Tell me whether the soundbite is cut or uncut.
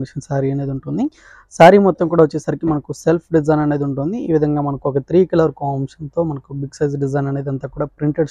uncut